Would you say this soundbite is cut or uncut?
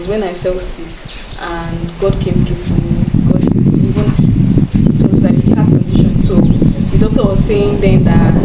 uncut